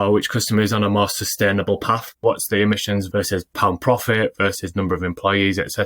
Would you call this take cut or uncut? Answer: cut